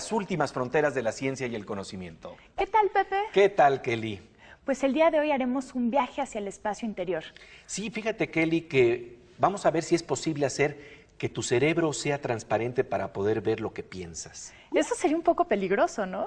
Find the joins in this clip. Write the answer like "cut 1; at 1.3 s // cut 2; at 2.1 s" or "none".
none